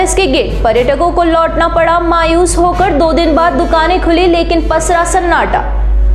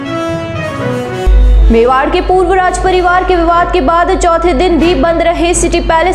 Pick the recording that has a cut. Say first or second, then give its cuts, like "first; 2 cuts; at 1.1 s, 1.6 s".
second; 1 cut; at 1.2 s